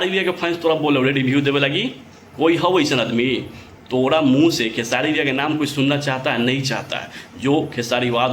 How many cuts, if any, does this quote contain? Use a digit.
0